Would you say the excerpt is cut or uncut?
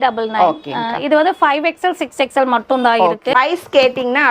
cut